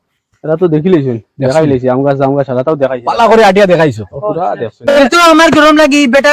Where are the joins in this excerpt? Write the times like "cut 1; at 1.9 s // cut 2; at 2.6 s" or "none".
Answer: cut 1; at 4.9 s